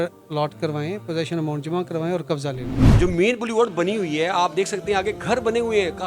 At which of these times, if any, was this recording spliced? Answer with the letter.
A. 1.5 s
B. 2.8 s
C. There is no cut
B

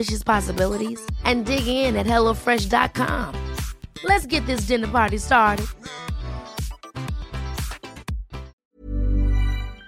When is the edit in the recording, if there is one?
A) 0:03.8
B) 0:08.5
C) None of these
B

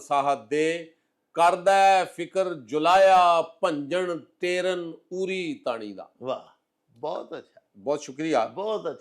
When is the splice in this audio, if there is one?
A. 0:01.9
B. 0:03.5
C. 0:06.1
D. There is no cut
D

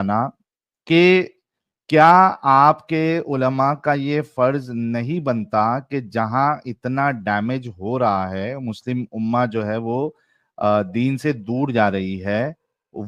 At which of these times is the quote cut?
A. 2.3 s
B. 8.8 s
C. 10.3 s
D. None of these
D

